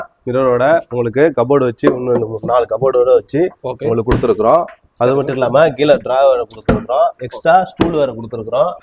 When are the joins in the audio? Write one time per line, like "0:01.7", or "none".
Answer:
none

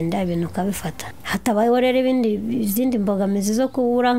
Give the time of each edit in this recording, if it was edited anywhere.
0:01.1

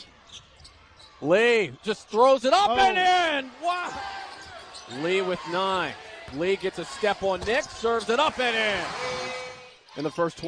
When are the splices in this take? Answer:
none

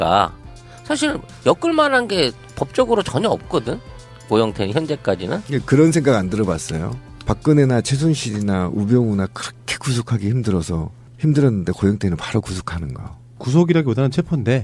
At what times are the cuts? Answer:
none

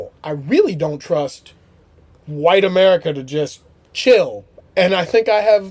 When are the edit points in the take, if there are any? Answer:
0:04.6

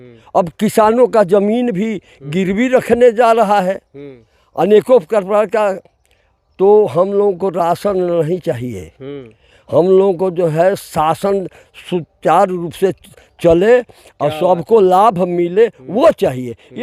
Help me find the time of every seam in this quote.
none

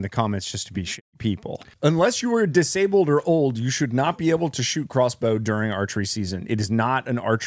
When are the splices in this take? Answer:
0:01.7

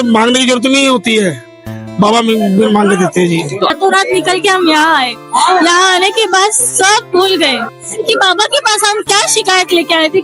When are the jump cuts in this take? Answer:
0:03.7

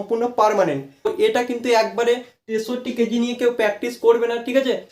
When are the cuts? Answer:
0:01.1

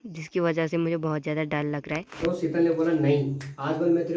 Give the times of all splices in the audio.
0:02.2

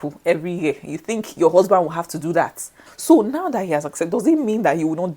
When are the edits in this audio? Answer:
0:02.9

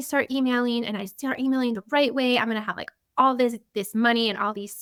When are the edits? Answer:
none

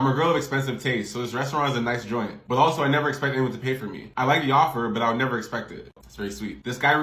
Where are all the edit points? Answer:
0:05.9

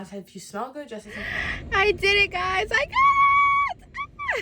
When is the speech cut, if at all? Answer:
0:01.3

